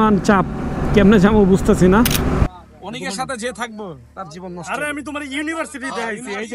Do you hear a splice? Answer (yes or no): yes